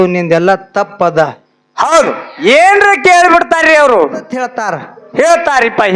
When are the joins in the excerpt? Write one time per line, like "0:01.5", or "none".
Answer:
0:04.5